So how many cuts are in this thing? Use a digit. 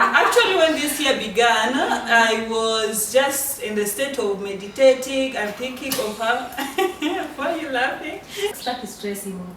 1